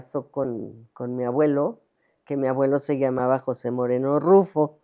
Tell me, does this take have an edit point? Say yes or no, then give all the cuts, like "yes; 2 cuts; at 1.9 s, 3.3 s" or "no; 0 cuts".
no; 0 cuts